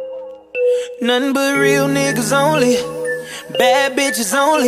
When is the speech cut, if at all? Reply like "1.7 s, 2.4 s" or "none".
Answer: 1.0 s